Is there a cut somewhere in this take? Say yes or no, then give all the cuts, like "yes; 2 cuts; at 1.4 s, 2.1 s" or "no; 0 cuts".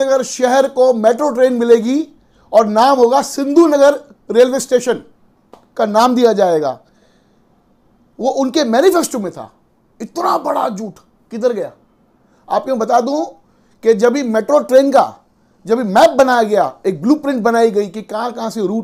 no; 0 cuts